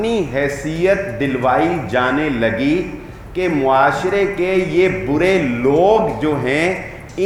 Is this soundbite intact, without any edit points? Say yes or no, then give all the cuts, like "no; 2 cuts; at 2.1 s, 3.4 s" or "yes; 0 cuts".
yes; 0 cuts